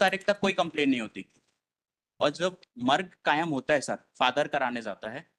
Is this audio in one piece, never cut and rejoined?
yes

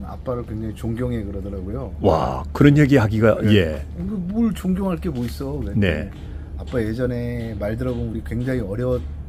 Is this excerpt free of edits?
yes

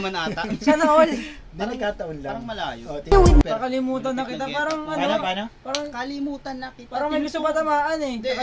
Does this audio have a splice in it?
yes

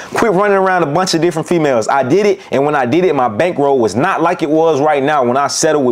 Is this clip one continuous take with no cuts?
yes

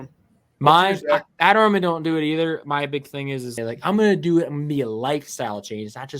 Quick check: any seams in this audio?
yes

